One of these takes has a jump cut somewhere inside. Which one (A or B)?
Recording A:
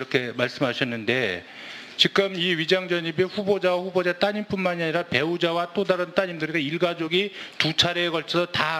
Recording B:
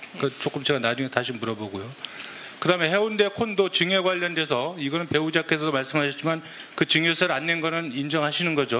A